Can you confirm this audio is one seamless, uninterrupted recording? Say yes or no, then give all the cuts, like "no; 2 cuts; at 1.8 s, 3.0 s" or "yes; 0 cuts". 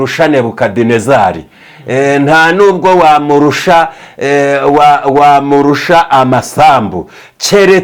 yes; 0 cuts